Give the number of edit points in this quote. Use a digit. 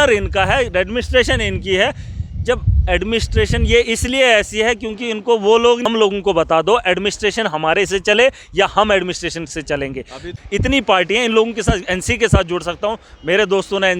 2